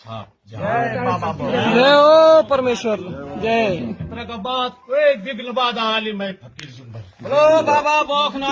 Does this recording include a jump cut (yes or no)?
no